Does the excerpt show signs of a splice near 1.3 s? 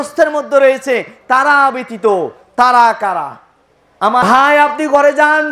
no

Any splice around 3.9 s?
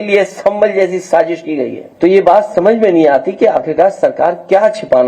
no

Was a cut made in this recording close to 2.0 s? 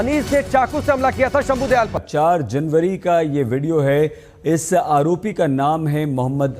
yes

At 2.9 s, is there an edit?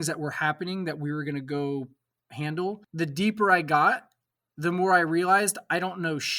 yes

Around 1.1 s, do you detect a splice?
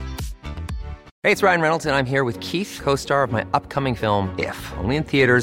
yes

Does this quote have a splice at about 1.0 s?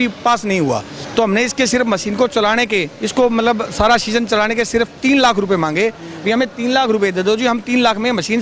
yes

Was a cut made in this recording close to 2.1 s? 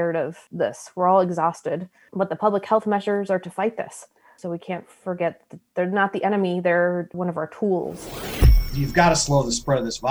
no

